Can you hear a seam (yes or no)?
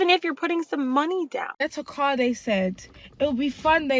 yes